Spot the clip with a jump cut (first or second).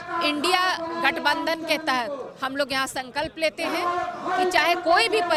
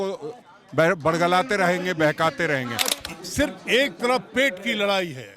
second